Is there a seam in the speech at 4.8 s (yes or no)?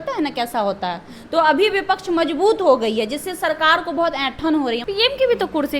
yes